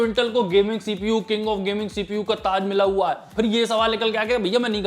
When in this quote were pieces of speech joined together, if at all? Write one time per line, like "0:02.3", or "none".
0:03.3